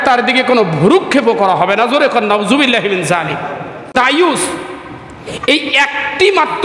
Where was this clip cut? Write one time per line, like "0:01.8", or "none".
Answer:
0:03.9